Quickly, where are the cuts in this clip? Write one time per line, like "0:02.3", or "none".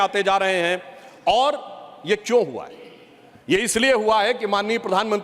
none